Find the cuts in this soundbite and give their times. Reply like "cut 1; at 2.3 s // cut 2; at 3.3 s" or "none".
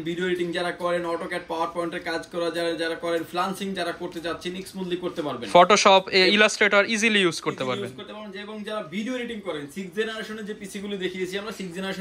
none